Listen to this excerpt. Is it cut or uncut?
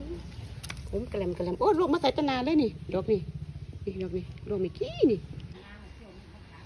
cut